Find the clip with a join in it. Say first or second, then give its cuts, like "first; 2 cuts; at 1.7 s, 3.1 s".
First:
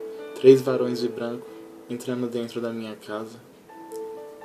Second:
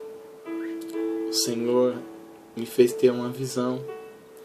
second; 1 cut; at 1.6 s